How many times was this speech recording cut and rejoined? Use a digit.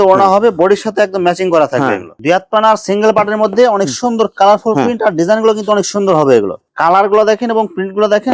2